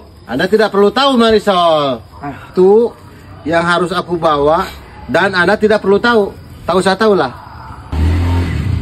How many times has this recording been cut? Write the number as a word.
two